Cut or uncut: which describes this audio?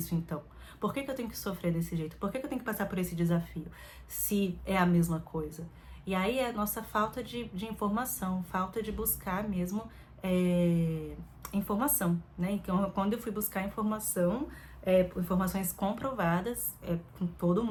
uncut